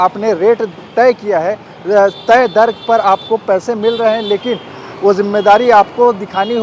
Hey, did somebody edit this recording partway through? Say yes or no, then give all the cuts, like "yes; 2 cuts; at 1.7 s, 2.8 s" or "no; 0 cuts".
no; 0 cuts